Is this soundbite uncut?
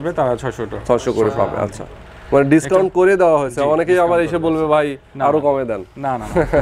yes; 0 cuts

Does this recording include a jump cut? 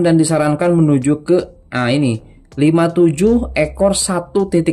no; 0 cuts

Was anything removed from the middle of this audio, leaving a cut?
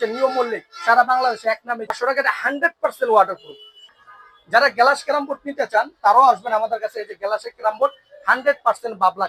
no; 0 cuts

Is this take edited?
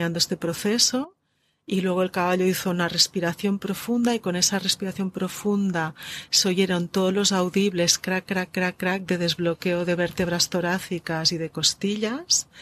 no; 0 cuts

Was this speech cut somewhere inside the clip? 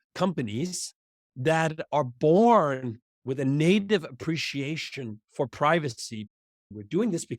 yes; 1 cut; at 6.4 s

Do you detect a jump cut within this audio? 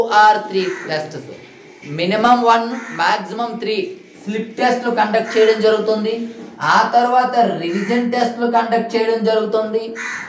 no; 0 cuts

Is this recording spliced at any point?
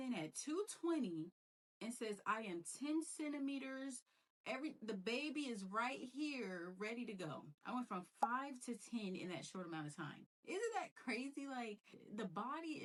no; 0 cuts

